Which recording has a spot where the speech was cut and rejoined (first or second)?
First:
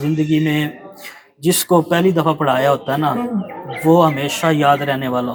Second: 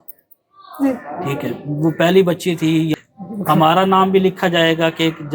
second